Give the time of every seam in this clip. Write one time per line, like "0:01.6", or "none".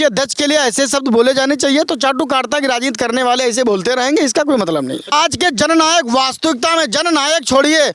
0:05.1